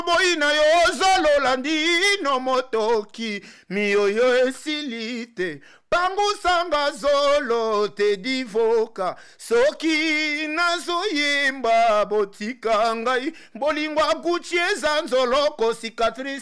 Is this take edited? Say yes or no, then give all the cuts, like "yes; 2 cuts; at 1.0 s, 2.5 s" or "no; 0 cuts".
no; 0 cuts